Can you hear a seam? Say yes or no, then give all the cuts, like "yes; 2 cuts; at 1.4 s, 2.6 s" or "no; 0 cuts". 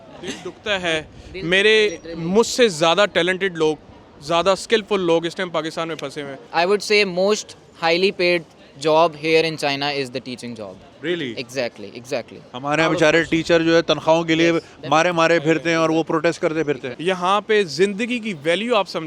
yes; 2 cuts; at 6.5 s, 16.9 s